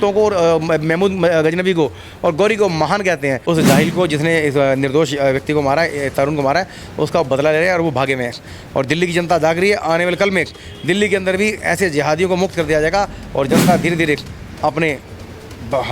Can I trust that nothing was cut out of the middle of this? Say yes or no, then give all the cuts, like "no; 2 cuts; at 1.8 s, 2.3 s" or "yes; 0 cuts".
no; 1 cut; at 3.4 s